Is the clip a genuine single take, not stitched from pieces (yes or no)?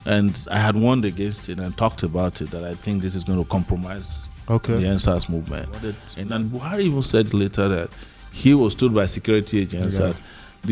no